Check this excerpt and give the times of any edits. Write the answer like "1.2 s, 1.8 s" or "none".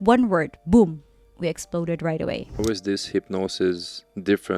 2.6 s